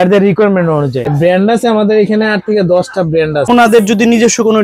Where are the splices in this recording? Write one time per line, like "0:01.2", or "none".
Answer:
0:01.1
0:03.5